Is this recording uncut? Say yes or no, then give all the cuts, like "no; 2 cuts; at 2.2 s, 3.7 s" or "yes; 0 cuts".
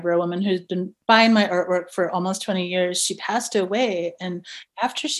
no; 1 cut; at 0.9 s